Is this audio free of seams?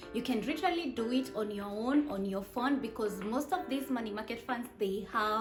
yes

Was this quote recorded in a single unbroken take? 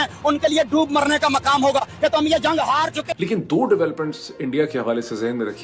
yes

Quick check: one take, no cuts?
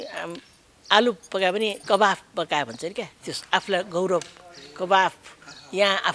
yes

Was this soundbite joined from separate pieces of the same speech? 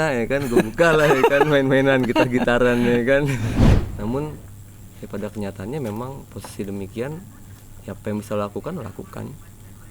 yes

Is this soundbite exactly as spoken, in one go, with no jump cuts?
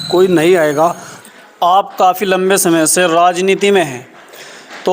no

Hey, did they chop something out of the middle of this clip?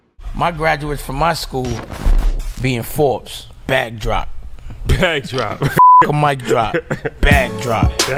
no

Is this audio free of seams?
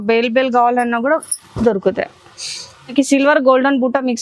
no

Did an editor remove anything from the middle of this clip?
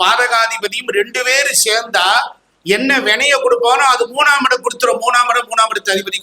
no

